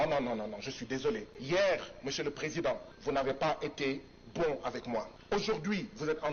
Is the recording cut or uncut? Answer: cut